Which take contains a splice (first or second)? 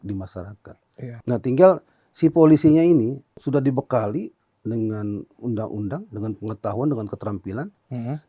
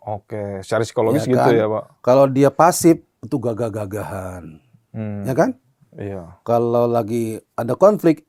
first